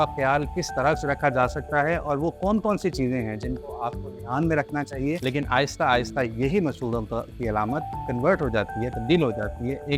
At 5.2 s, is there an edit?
yes; 1 cut; at 5.2 s

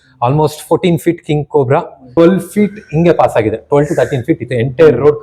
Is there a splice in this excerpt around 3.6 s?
no; 1 cut; at 2.0 s

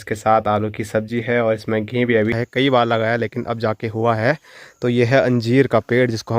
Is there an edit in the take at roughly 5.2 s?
no; 1 cut; at 2.3 s

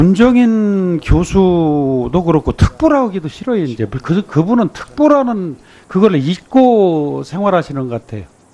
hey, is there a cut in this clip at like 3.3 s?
yes; 1 cut; at 3.3 s

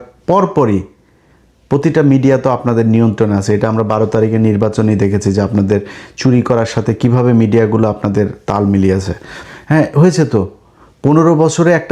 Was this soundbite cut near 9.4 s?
yes; 1 cut; at 9.4 s

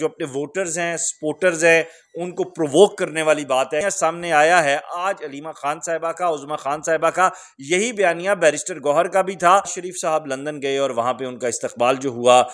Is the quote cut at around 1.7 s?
no; 2 cuts; at 3.8 s, 9.8 s

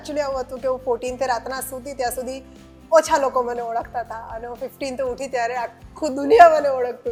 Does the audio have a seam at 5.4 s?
no; 0 cuts

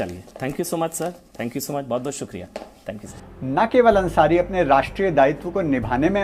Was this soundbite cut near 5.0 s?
no; 1 cut; at 3.2 s

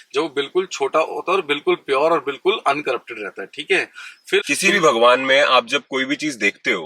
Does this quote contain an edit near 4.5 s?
yes; 1 cut; at 4.5 s

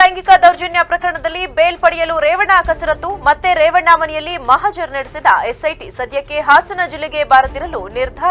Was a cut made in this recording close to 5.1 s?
no; 0 cuts

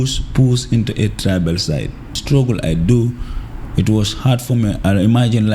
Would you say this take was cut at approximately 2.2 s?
yes; 1 cut; at 2.2 s

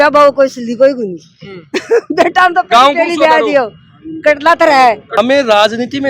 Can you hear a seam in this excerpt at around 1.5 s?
no; 1 cut; at 5.0 s

